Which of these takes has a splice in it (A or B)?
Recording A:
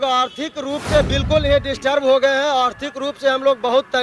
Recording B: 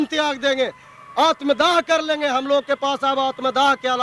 A